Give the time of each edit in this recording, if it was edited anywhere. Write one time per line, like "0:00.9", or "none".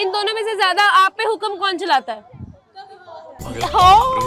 none